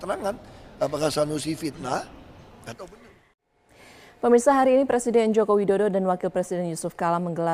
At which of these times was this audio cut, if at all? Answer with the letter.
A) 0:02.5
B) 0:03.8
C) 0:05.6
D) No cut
C